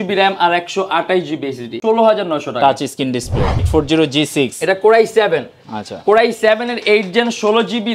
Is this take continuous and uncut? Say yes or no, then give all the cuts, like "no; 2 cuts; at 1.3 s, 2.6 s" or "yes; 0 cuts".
no; 2 cuts; at 1.7 s, 3.6 s